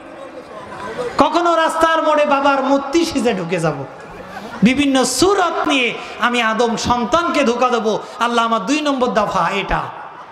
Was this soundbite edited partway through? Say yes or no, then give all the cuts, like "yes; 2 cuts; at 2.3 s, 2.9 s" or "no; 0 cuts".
no; 0 cuts